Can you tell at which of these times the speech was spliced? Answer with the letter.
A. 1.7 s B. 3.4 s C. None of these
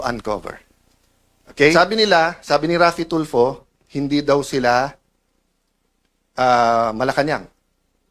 A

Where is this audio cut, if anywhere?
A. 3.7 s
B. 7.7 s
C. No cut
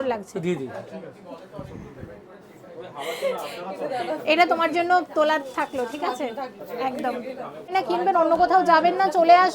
B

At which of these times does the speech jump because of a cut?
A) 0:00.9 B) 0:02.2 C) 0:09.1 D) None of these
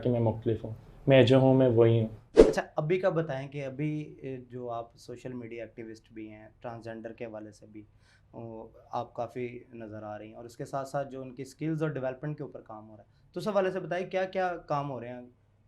B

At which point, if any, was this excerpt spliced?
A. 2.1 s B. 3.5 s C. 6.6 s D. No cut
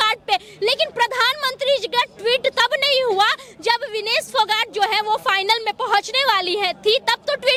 D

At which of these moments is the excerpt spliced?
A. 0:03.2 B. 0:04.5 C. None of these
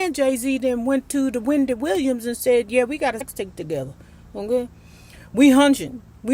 A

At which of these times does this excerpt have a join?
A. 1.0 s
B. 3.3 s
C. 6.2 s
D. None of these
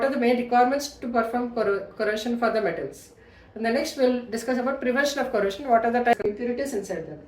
C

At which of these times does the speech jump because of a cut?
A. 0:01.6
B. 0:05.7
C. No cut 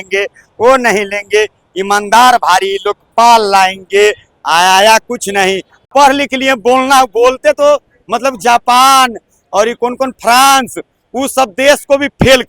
B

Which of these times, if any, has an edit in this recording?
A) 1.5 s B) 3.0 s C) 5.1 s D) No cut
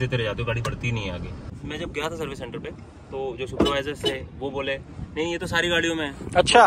A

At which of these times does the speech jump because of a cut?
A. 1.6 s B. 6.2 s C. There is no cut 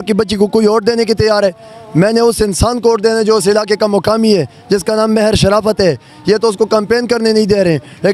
C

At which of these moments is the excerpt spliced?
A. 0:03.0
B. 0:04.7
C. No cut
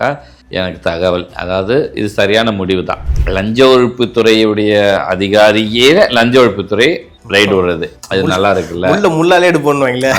A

